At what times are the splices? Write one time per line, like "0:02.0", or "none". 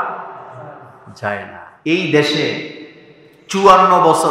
0:01.6